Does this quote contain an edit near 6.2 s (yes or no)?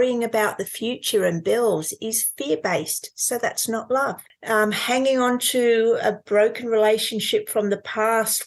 no